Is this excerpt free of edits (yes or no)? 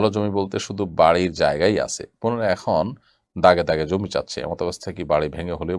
yes